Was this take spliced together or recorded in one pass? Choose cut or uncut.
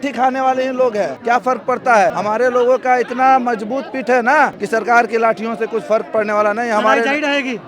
cut